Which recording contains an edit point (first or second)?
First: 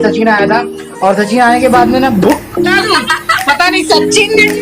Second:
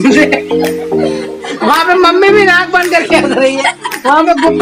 first